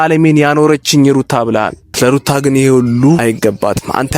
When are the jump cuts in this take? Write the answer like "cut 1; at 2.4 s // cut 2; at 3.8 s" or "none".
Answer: cut 1; at 1.9 s // cut 2; at 3.2 s

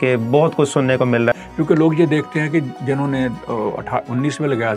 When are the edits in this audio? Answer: cut 1; at 1.3 s

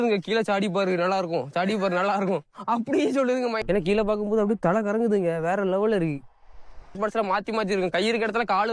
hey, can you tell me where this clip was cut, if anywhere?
cut 1; at 3.6 s // cut 2; at 7.0 s

